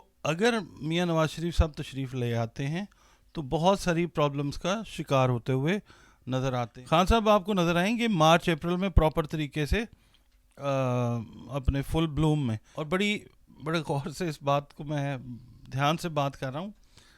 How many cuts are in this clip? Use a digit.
2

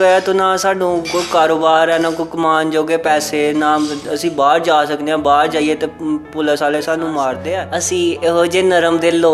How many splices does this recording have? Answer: 1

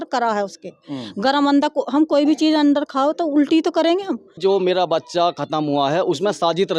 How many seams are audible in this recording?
1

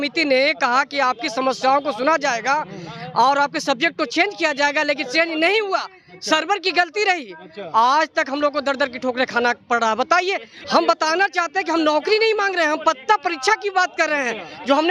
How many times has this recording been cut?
1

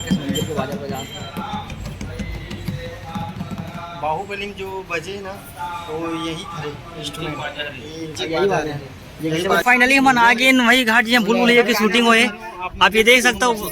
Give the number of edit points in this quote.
1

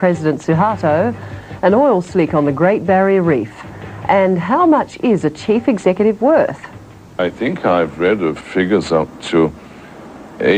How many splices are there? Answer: 1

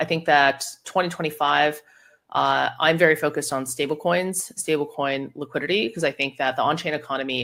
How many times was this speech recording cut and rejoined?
0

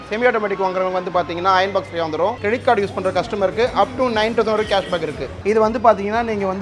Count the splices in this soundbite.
2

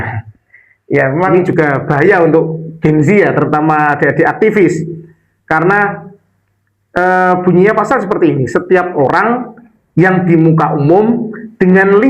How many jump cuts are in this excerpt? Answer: 1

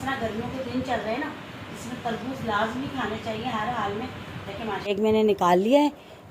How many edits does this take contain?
1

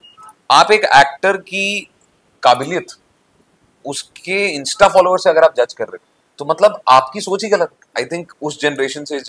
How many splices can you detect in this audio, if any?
1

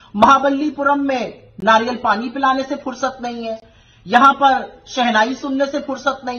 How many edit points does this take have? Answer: 0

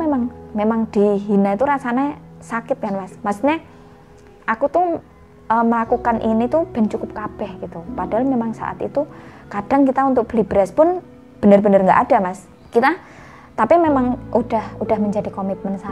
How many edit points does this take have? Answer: 0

